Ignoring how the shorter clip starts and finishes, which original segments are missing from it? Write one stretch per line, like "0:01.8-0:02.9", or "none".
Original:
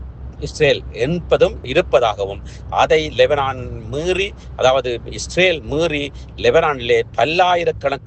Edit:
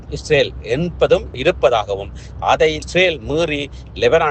0:03.1-0:05.2

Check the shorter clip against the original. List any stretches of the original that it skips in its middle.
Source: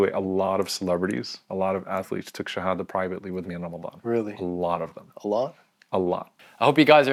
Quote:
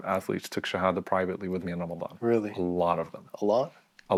none

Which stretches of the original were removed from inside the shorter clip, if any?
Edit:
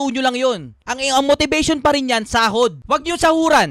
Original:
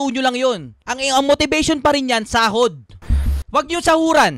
0:02.8-0:03.4

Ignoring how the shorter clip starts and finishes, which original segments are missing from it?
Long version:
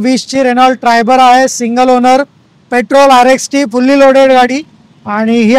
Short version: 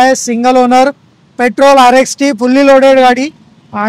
none

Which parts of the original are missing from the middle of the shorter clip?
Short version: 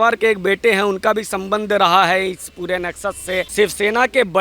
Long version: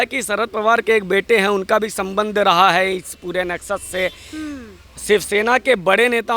0:04.2-0:05.0

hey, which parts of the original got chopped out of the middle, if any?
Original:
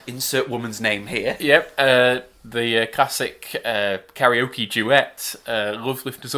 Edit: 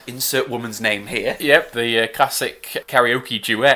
0:01.7-0:02.5
0:03.6-0:04.1

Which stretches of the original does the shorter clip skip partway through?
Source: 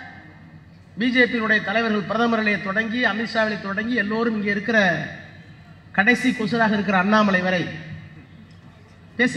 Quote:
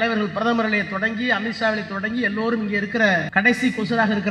0:05.0-0:05.9

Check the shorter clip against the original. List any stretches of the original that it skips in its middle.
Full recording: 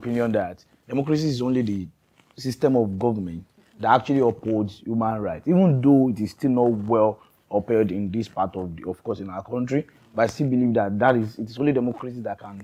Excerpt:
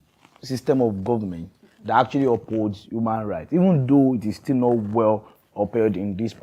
none

